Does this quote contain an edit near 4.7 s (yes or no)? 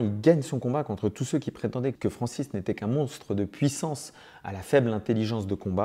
no